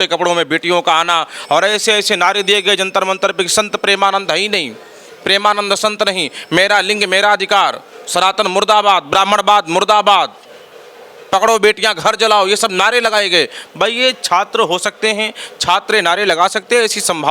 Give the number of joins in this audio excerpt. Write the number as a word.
zero